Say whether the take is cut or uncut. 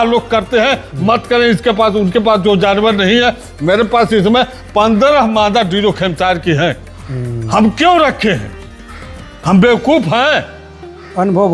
uncut